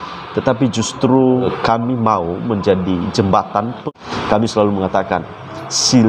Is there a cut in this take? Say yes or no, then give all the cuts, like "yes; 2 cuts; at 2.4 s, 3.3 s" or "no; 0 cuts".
yes; 2 cuts; at 1.5 s, 3.8 s